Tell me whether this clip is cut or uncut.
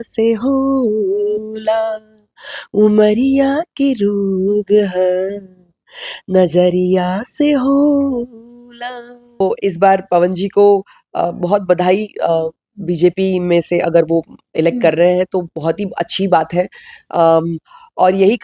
cut